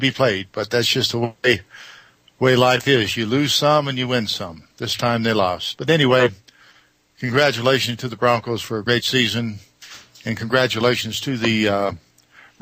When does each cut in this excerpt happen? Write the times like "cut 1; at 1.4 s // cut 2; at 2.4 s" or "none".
none